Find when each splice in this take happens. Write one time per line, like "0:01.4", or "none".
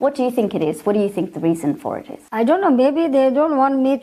0:02.1